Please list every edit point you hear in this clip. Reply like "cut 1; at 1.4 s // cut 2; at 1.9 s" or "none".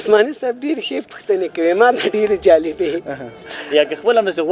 cut 1; at 3.5 s